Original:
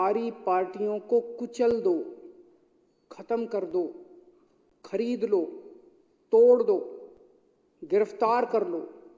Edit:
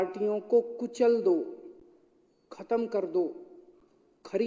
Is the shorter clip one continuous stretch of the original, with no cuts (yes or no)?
yes